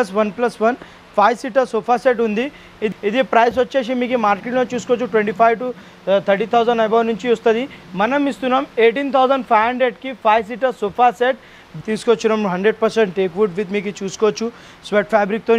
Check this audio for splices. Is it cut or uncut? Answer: cut